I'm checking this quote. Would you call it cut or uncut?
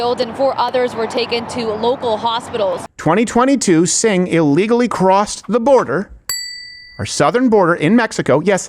cut